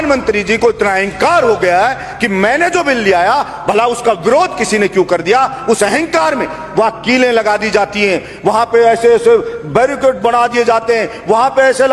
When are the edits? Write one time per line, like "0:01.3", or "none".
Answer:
none